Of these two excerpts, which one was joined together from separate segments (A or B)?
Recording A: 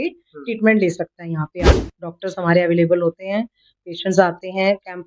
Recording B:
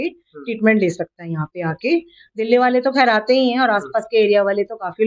A